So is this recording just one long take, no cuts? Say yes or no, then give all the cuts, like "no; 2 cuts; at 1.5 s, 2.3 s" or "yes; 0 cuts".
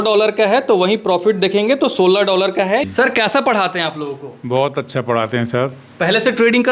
yes; 0 cuts